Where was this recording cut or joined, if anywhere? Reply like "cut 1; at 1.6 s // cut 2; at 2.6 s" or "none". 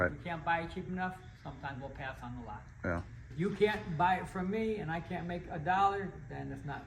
cut 1; at 3.2 s